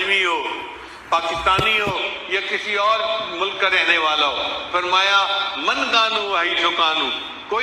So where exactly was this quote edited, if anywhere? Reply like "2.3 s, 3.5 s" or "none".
none